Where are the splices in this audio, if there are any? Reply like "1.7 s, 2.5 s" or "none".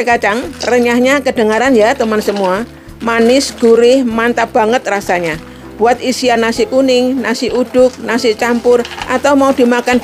none